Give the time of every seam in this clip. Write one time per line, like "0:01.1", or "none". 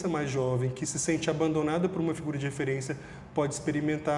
none